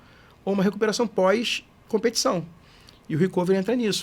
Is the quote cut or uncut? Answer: uncut